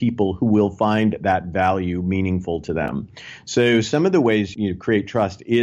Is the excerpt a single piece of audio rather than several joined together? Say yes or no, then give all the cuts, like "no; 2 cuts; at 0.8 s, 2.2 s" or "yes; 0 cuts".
no; 1 cut; at 4.5 s